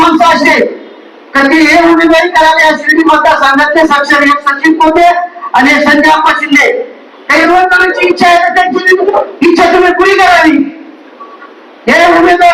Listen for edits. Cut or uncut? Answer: cut